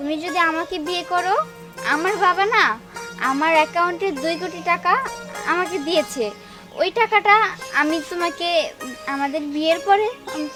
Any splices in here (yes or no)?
no